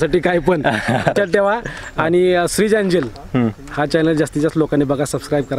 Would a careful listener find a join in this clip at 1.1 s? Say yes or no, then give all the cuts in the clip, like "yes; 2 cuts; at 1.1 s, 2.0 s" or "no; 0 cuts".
yes; 1 cut; at 1.1 s